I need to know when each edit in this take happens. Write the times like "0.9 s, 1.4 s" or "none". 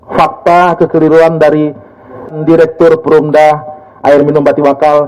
2.3 s